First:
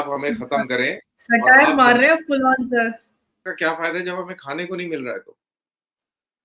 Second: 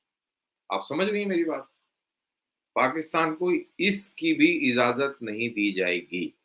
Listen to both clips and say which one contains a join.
first; 1 cut; at 3.5 s

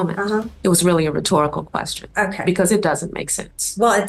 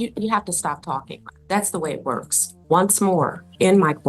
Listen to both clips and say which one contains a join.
second; 1 cut; at 2.6 s

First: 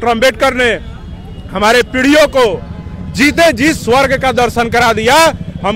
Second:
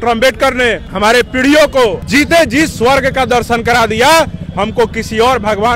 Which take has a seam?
second; 2 cuts; at 0.9 s, 2.0 s

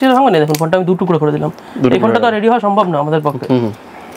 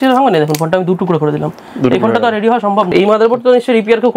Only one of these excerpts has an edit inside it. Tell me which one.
second; 1 cut; at 2.9 s

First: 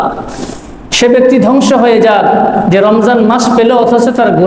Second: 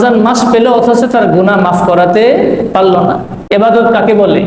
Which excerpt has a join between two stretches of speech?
second; 1 cut; at 3.3 s

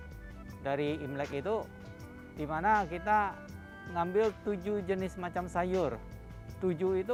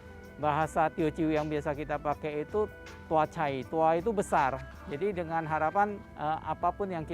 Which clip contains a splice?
second; 2 cuts; at 2.9 s, 6.1 s

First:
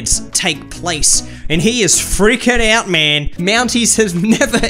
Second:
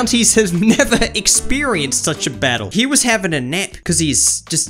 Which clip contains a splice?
second; 2 cuts; at 2.7 s, 3.7 s

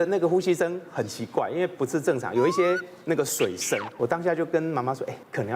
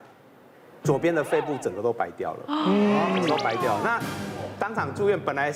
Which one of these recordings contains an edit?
first; 1 cut; at 3.9 s

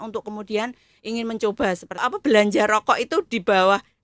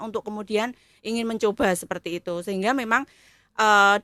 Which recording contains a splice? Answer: first; 1 cut; at 2.1 s

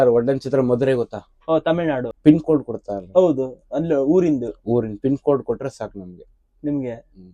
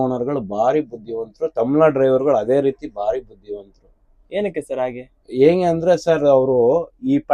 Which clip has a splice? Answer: first; 1 cut; at 2.1 s

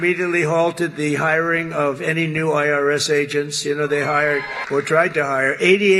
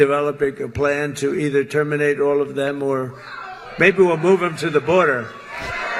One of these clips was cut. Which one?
first; 1 cut; at 4.5 s

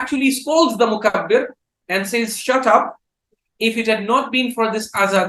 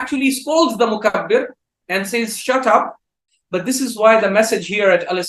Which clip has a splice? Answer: second; 1 cut; at 3.3 s

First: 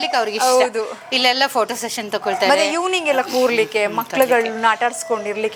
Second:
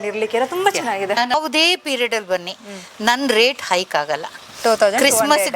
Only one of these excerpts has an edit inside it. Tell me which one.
second; 1 cut; at 1.3 s

